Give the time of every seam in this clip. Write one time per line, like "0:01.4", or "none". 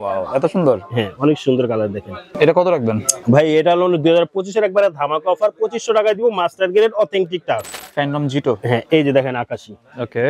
0:02.3
0:07.7